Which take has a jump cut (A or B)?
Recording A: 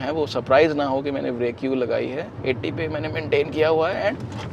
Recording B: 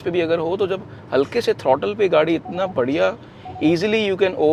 A